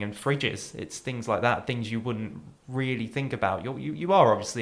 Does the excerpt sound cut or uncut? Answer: uncut